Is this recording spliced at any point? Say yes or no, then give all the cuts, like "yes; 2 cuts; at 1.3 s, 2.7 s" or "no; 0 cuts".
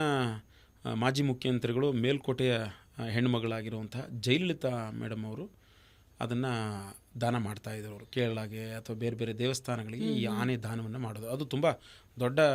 no; 0 cuts